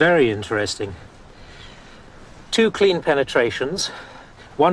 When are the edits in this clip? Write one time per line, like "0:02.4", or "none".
none